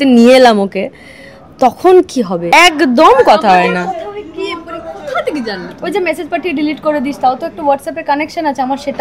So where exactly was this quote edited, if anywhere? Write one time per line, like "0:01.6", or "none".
0:02.4

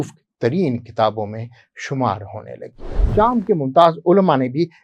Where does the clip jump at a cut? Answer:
0:03.0

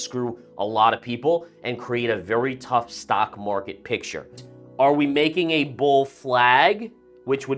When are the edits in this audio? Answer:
0:04.5

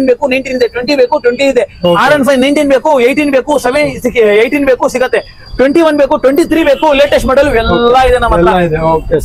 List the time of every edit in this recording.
none

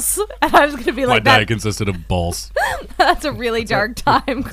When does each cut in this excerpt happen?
none

